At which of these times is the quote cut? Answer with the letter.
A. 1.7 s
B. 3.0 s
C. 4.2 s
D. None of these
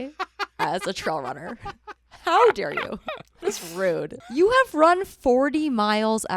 C